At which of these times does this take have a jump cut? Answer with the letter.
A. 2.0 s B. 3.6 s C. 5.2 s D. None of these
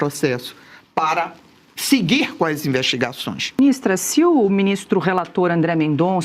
B